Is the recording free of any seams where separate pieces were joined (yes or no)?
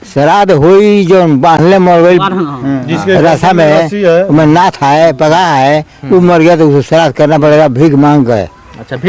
yes